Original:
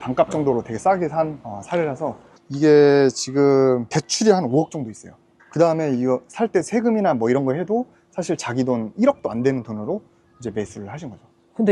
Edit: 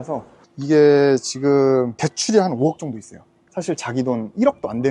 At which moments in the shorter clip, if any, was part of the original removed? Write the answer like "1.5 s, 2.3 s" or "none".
3.4 s